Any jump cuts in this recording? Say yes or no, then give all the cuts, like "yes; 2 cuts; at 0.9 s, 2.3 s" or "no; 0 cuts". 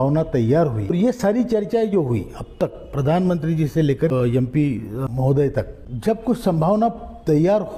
yes; 4 cuts; at 0.9 s, 4.1 s, 5.1 s, 5.8 s